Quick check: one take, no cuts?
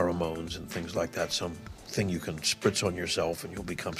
yes; 0 cuts

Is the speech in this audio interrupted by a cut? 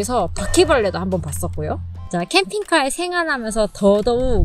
yes; 1 cut; at 1.9 s

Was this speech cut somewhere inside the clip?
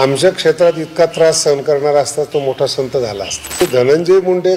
yes; 1 cut; at 3.6 s

